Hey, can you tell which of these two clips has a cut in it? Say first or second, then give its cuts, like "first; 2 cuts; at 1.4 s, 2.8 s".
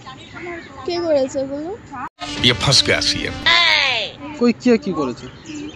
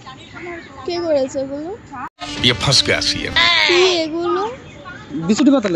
second; 1 cut; at 3.3 s